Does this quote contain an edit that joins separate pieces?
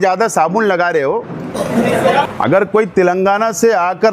yes; 1 cut; at 2.3 s

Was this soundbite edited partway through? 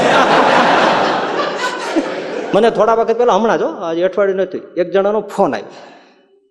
yes; 1 cut; at 2.5 s

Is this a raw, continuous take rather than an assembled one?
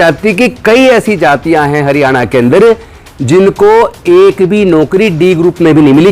yes; 0 cuts

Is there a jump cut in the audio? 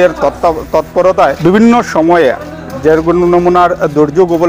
yes; 1 cut; at 1.4 s

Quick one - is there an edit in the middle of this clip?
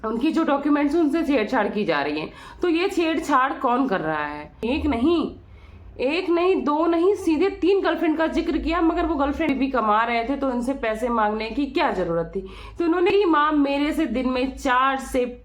yes; 3 cuts; at 4.6 s, 9.5 s, 13.1 s

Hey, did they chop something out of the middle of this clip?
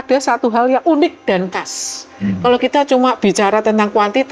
no; 0 cuts

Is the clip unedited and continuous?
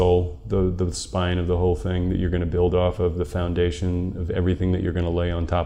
yes; 0 cuts

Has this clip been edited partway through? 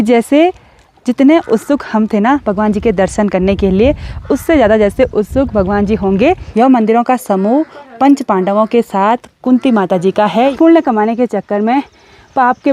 yes; 2 cuts; at 6.4 s, 10.5 s

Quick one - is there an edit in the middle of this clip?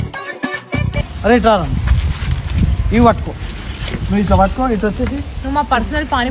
yes; 1 cut; at 1.0 s

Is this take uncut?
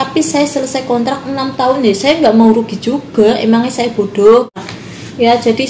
no; 1 cut; at 4.6 s

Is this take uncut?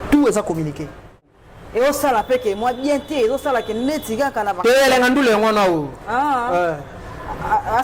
no; 1 cut; at 1.3 s

